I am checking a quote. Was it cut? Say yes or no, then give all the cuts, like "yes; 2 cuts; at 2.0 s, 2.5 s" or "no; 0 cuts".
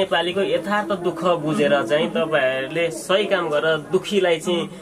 no; 0 cuts